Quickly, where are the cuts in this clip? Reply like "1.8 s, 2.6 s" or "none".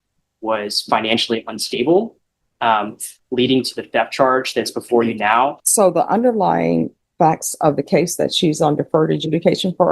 5.6 s